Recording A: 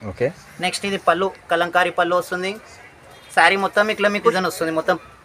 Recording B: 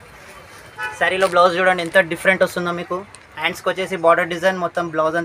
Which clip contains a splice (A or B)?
A